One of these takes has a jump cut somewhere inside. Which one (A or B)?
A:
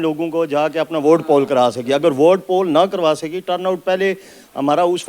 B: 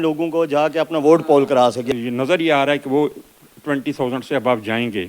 B